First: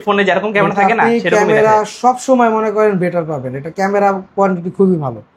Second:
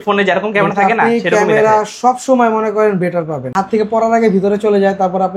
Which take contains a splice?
second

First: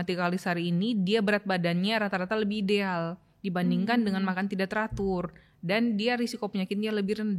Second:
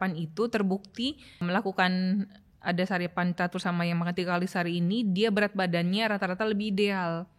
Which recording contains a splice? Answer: second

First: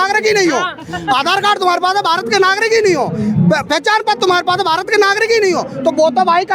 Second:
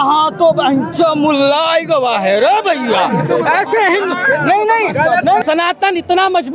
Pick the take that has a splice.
second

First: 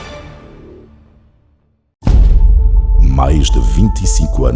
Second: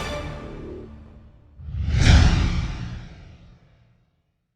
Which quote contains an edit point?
first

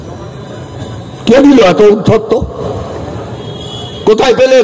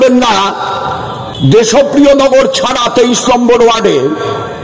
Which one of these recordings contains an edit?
second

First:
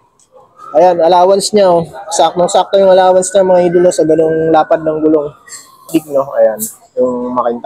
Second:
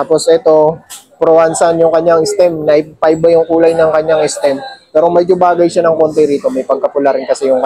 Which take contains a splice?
first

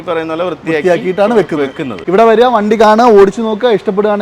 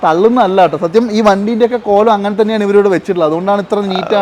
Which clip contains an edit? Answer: first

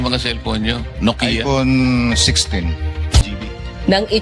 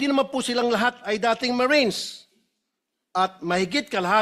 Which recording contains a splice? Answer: first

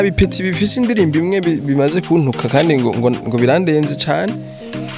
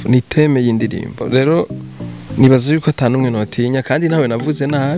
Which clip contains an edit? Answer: second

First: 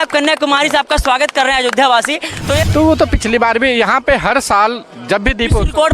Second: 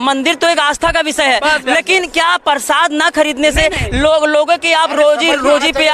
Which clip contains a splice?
first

